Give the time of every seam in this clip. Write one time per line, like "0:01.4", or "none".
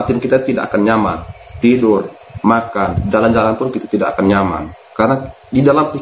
0:03.0